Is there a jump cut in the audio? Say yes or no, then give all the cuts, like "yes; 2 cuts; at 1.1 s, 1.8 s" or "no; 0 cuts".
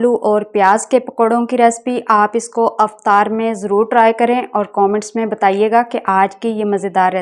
no; 0 cuts